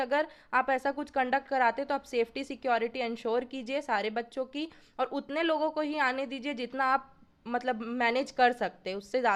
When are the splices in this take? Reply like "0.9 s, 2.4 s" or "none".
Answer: none